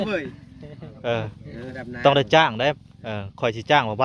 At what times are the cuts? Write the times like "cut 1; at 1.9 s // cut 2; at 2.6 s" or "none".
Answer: cut 1; at 1.7 s